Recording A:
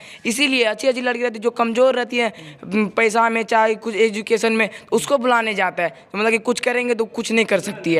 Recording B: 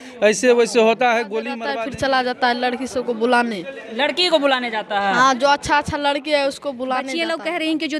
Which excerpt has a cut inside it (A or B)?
B